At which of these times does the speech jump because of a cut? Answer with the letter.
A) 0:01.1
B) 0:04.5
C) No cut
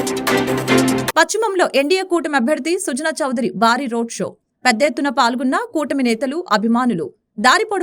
A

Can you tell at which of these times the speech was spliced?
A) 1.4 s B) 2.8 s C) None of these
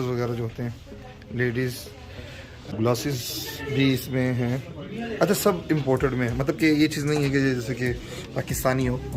B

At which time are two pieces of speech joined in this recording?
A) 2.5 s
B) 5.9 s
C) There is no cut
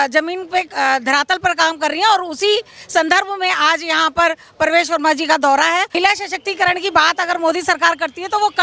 B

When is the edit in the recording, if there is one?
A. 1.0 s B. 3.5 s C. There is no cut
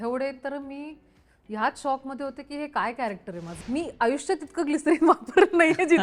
B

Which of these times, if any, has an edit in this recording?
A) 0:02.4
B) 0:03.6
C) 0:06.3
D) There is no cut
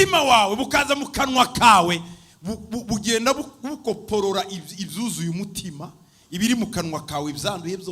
D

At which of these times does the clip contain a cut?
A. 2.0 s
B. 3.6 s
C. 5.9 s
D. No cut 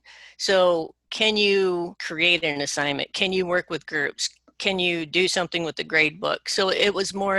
A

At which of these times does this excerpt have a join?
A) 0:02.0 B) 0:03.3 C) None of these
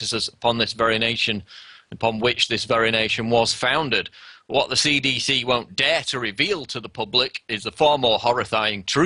C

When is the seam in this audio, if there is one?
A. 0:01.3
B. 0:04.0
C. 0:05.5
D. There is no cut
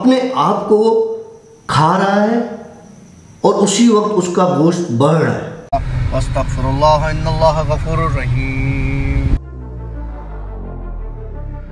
C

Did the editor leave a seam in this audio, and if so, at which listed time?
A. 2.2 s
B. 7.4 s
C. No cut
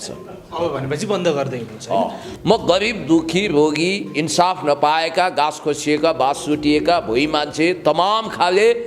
A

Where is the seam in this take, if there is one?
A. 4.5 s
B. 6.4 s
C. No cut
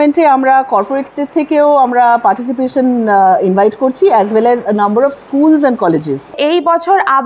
B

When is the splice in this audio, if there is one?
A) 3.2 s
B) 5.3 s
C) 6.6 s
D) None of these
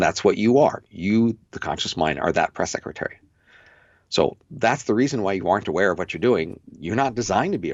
D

